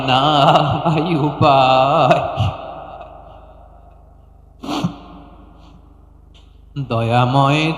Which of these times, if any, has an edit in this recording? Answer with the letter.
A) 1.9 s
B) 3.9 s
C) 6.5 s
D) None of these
D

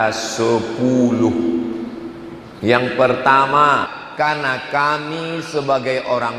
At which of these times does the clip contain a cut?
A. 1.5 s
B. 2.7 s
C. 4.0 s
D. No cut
C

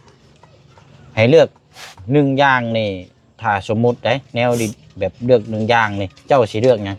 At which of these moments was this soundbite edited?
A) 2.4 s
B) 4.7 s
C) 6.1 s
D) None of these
D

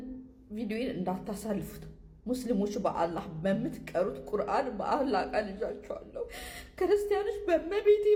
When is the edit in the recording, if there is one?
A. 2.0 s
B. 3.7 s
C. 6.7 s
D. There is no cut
D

